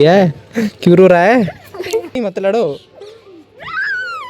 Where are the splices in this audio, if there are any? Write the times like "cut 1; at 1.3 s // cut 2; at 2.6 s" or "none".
cut 1; at 2.2 s